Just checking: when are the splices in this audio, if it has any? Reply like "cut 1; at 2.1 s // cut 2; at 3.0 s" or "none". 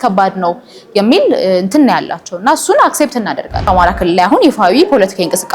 cut 1; at 3.7 s